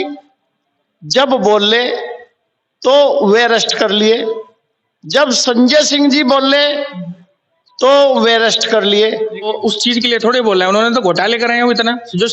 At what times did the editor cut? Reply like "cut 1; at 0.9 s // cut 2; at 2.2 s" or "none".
cut 1; at 9.5 s